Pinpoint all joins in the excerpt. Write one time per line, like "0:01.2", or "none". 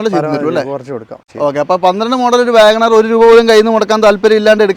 0:01.1